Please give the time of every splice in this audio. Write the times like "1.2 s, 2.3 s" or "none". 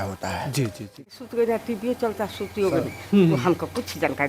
0.9 s